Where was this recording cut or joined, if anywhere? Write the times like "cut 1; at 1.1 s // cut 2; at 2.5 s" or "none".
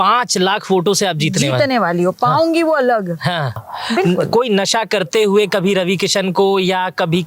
cut 1; at 3.6 s